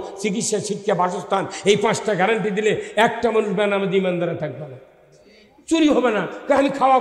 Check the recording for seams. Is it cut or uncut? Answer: uncut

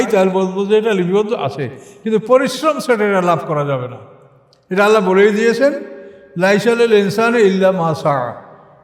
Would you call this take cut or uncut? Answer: uncut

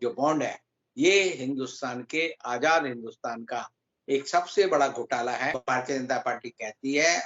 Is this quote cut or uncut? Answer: cut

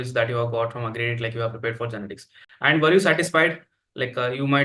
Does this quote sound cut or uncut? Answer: uncut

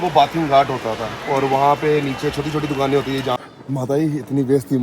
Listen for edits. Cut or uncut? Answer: cut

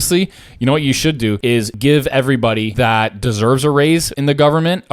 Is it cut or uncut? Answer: cut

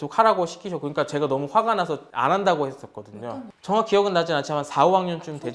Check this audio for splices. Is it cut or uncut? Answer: uncut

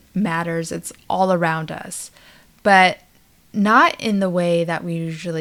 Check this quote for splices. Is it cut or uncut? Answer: uncut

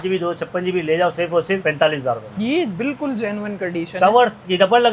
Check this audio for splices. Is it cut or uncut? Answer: uncut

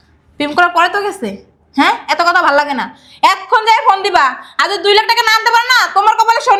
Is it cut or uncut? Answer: uncut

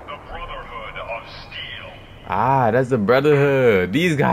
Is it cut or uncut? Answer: uncut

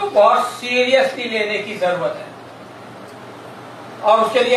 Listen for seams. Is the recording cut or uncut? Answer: uncut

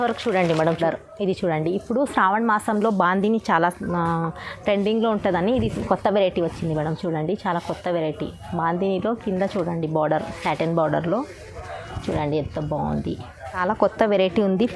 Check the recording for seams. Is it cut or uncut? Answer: cut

